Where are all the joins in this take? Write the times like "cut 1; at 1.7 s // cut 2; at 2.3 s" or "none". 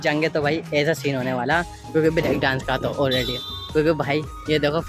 none